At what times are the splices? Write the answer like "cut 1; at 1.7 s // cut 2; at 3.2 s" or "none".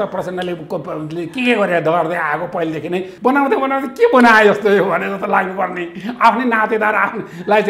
cut 1; at 3.1 s